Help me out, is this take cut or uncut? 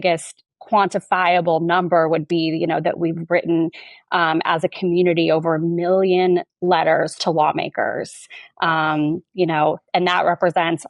uncut